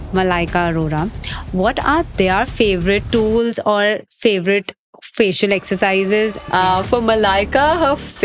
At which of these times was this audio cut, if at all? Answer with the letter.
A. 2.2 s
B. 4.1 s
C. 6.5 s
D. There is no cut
C